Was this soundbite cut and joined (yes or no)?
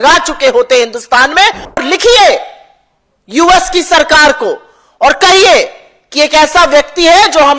yes